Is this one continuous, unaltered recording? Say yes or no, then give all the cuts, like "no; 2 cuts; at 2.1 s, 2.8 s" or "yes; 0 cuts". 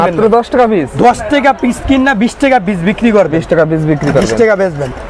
yes; 0 cuts